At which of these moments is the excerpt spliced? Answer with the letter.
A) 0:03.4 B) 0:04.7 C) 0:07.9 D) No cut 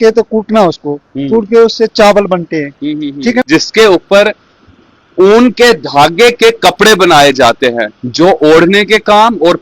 A